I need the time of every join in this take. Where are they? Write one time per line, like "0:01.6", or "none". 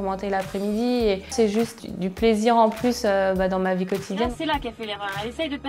0:01.8
0:04.3